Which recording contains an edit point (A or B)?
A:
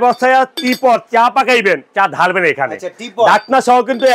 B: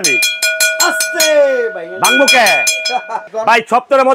B